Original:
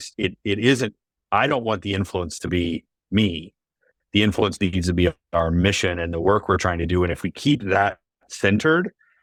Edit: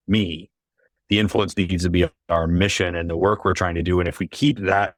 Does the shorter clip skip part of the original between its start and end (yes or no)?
no